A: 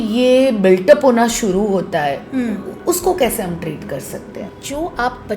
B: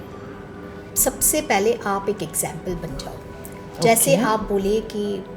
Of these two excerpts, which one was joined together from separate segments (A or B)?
A